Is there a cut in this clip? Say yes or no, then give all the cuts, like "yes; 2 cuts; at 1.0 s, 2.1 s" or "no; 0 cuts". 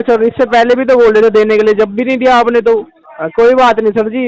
yes; 1 cut; at 3.0 s